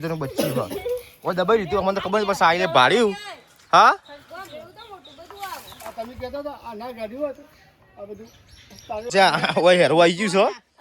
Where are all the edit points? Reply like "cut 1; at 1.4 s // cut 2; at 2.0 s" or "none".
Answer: cut 1; at 9.1 s